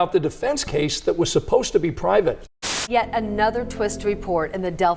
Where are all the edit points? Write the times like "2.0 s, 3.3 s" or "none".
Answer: 2.5 s